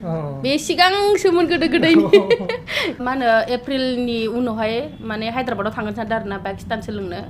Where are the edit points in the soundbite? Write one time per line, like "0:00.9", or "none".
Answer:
0:03.0

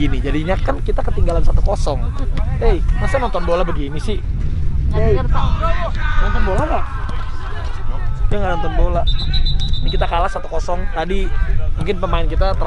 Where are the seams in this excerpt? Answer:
none

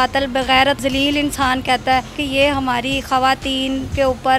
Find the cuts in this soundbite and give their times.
0:00.8
0:02.2

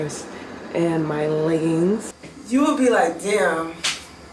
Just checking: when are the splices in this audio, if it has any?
0:02.2

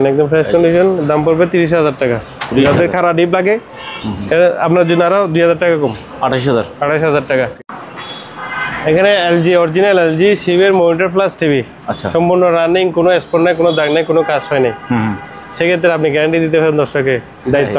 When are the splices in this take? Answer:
0:07.5

